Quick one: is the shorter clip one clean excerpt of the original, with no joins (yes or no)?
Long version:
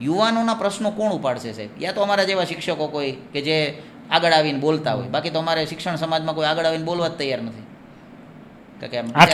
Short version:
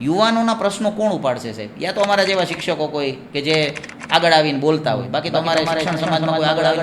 yes